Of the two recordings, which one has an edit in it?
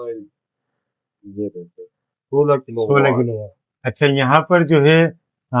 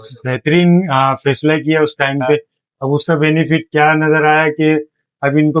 second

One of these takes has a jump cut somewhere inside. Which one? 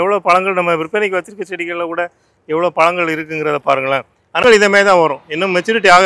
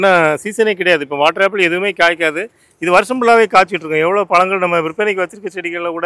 first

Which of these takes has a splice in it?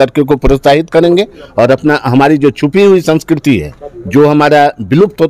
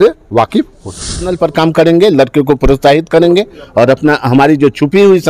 second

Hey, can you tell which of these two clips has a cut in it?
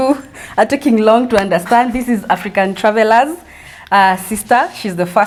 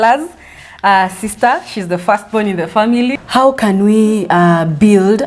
second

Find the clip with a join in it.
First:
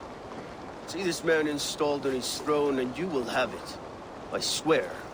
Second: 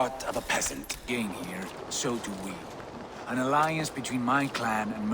second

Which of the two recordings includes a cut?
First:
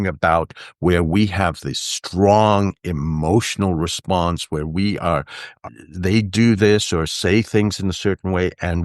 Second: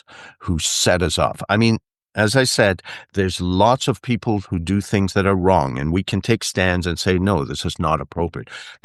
first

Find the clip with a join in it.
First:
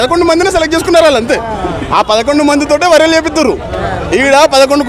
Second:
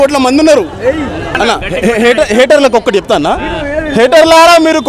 second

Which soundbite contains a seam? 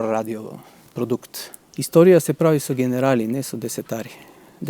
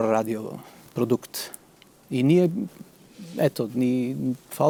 first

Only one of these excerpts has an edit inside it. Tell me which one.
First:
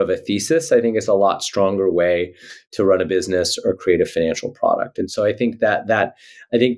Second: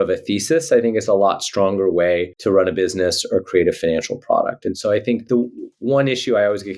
second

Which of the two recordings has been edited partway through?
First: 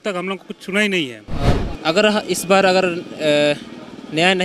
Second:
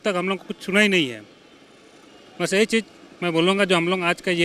first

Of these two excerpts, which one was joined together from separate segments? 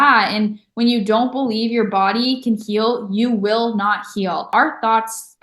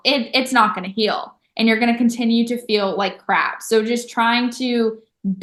first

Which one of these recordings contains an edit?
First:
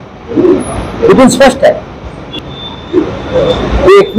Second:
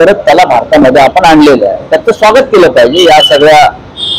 first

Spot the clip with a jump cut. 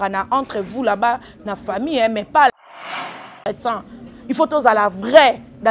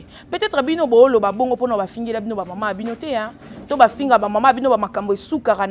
first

